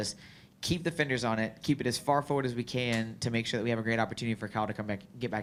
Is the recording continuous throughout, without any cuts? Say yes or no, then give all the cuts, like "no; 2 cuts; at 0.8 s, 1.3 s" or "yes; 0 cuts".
yes; 0 cuts